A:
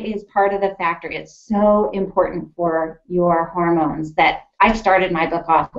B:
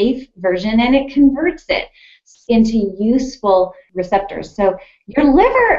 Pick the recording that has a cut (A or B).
B